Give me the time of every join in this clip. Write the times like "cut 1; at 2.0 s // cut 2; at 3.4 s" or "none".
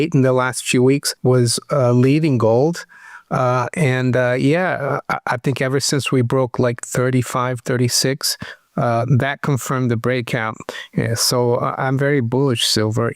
cut 1; at 1.1 s